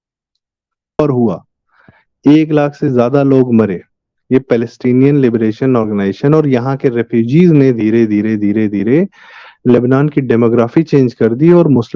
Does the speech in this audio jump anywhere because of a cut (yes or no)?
yes